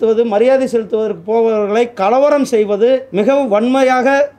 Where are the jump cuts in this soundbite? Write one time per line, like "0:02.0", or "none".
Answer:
0:03.1